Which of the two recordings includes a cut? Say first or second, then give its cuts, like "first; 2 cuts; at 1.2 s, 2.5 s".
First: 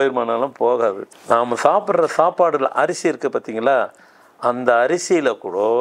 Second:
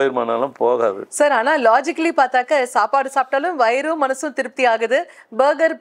first; 1 cut; at 1.0 s